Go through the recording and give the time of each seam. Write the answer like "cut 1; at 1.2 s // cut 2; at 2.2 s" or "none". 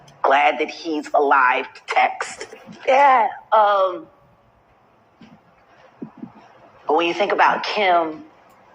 cut 1; at 2.6 s